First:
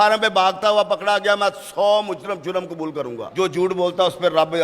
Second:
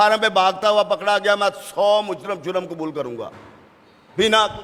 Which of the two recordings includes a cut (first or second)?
first